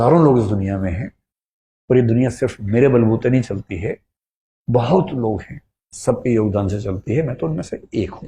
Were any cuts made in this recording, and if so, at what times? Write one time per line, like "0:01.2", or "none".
none